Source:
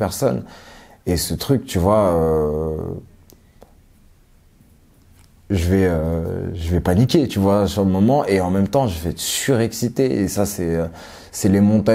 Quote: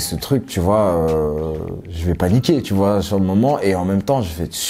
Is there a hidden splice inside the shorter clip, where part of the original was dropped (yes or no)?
yes